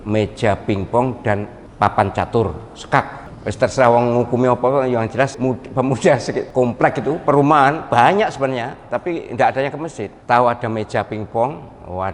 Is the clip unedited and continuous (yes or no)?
no